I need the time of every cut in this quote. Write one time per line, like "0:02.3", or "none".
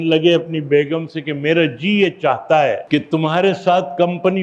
0:02.8